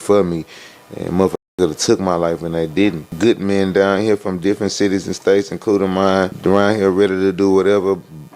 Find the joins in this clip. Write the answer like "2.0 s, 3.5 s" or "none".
3.1 s, 6.3 s